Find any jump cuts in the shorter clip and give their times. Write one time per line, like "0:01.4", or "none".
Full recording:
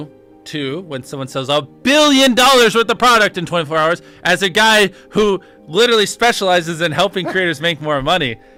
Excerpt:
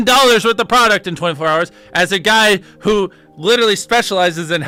none